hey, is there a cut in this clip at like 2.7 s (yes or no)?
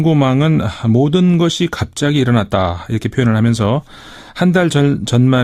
no